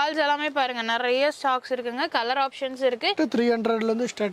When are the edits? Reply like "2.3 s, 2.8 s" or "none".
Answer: 3.1 s

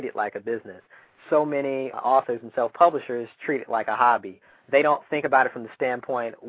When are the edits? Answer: 4.4 s

